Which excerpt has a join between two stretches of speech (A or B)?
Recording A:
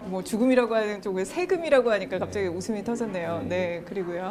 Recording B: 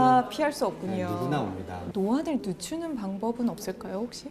B